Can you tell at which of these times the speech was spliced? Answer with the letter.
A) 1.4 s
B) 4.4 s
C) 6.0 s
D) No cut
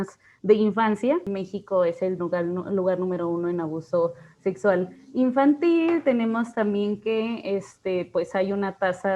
A